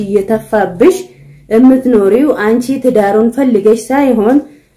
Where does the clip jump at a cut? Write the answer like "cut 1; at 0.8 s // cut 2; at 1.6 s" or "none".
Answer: none